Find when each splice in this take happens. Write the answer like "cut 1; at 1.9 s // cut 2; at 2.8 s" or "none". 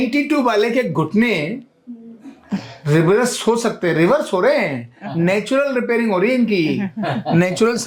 none